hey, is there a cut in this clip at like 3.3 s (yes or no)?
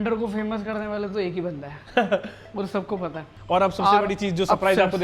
yes